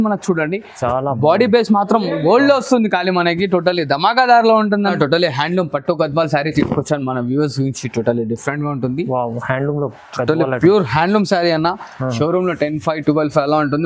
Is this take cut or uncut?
cut